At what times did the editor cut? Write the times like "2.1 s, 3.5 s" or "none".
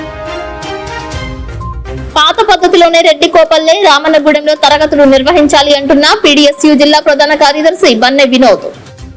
1.0 s